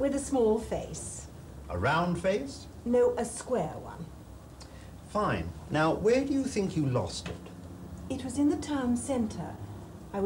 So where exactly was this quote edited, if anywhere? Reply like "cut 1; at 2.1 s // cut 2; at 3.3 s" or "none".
cut 1; at 2.6 s